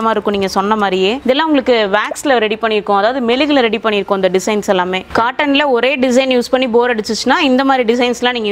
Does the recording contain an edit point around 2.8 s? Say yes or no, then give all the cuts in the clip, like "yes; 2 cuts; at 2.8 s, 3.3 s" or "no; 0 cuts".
no; 2 cuts; at 1.2 s, 5.1 s